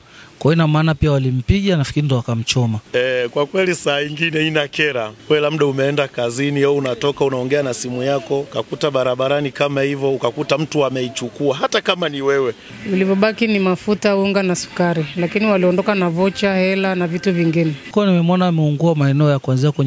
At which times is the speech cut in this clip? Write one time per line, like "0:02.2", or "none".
0:02.8
0:05.1
0:08.5
0:12.7
0:17.9